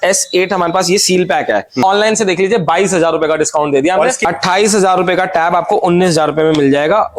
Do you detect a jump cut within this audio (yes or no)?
yes